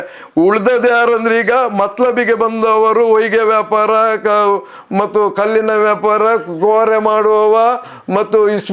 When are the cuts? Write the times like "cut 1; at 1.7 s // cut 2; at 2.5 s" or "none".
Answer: none